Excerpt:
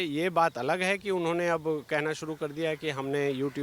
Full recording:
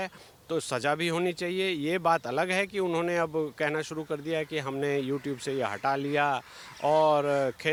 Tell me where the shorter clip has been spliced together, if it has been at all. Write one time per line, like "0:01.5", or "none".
none

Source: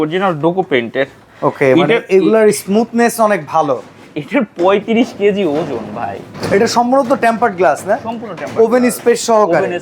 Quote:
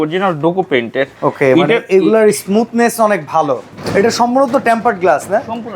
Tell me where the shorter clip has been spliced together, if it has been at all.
0:01.1
0:03.7

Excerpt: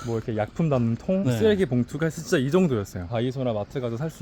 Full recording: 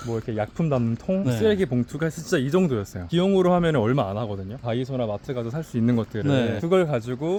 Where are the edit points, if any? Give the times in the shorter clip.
0:02.9

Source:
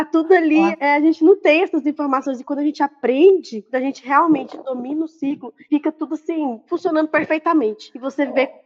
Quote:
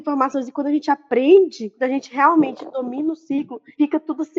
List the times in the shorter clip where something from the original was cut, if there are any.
none

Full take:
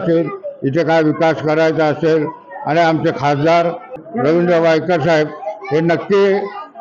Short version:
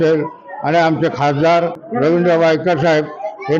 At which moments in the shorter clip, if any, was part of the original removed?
0:01.8

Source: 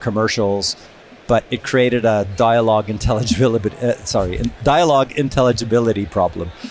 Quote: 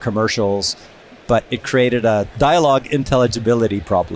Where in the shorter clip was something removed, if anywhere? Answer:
0:02.3

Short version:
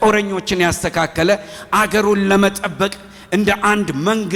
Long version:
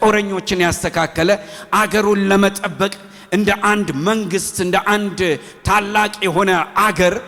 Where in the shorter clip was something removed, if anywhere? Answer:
none

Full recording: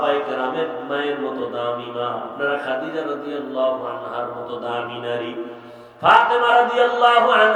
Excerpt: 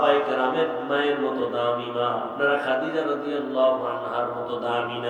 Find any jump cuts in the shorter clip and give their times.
none

